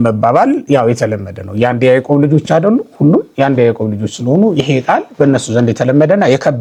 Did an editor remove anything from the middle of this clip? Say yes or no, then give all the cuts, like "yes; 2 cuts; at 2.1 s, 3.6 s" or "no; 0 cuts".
no; 0 cuts